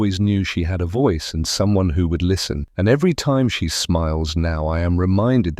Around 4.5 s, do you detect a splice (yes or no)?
no